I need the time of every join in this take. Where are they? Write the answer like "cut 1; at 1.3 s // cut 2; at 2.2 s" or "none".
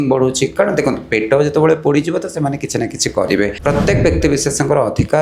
cut 1; at 3.6 s